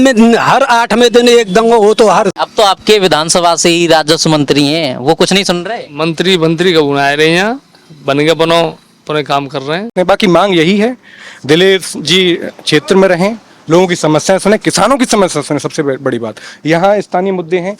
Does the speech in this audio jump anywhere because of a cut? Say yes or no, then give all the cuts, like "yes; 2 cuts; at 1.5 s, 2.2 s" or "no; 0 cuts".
yes; 2 cuts; at 2.4 s, 9.9 s